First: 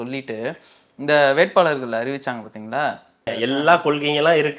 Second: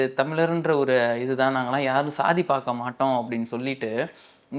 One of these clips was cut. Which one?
first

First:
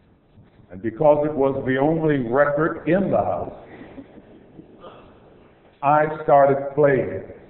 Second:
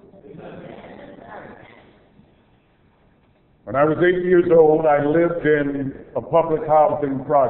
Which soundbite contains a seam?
first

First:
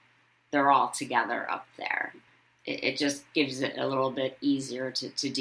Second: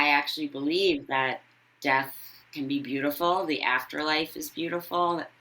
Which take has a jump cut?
first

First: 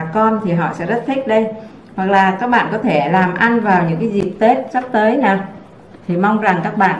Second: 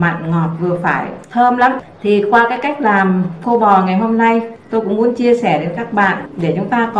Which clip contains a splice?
second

